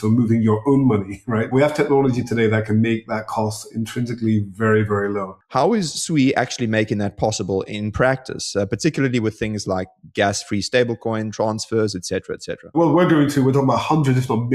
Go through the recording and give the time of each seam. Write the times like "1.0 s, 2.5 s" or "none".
1.5 s, 5.4 s, 12.8 s